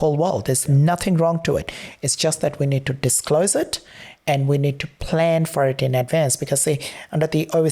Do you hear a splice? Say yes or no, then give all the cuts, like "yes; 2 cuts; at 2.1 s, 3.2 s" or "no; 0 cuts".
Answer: no; 0 cuts